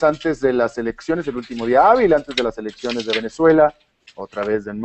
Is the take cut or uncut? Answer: uncut